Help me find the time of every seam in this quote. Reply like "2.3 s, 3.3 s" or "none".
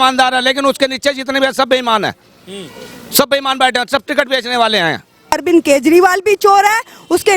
5.3 s